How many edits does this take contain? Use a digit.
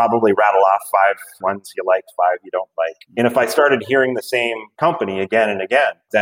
0